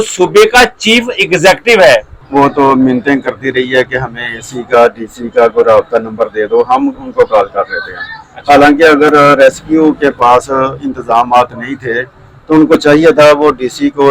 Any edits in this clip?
yes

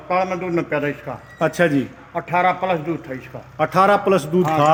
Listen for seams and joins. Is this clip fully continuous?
yes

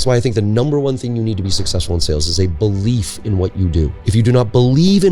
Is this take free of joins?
no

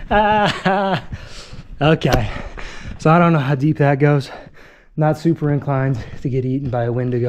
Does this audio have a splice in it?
no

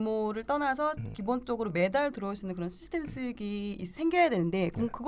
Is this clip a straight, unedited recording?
yes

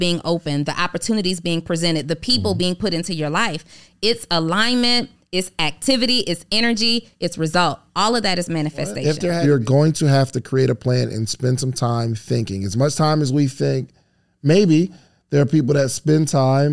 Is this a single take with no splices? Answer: no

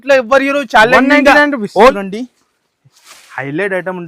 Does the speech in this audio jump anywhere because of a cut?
yes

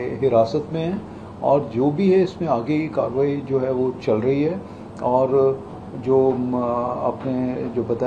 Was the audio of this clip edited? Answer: no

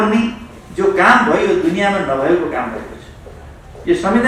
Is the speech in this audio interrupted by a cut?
no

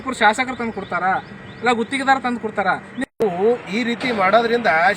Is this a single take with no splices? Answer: no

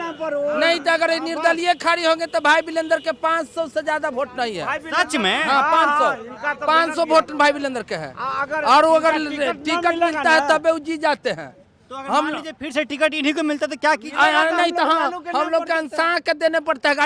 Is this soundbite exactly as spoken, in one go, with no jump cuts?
yes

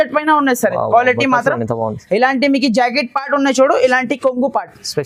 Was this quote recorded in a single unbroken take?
yes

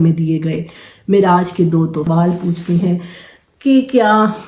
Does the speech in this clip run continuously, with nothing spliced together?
no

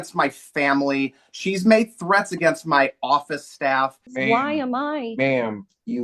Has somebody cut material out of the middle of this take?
yes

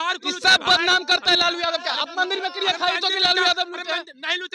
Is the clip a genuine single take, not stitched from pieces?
yes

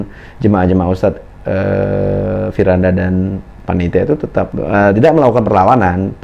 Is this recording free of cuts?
no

